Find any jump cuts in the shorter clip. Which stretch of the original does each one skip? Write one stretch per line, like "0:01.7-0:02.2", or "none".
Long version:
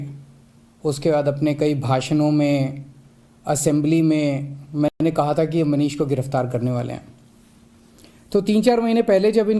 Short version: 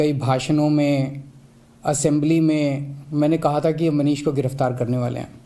0:04.9-0:05.0